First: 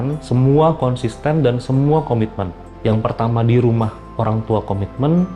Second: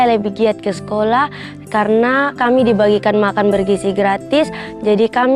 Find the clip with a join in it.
first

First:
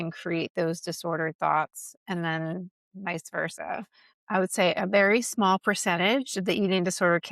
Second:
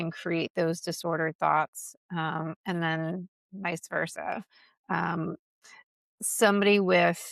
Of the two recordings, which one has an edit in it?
first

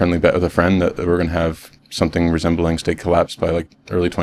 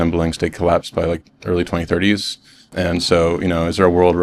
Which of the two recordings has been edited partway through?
second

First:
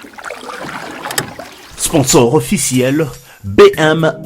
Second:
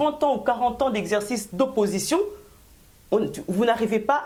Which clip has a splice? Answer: first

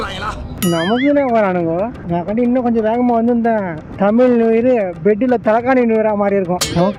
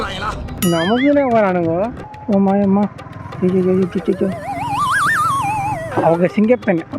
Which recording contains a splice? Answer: second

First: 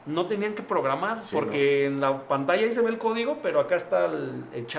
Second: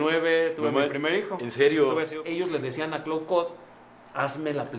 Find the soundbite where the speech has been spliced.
second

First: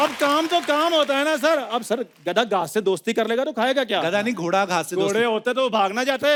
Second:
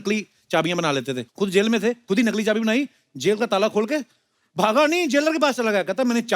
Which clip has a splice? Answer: second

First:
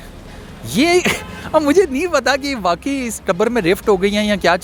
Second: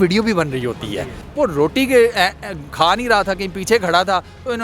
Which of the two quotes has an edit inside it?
second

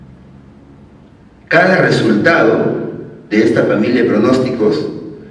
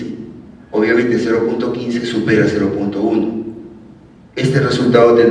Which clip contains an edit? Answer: second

